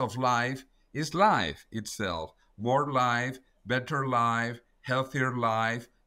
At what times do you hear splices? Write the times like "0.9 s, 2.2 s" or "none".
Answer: none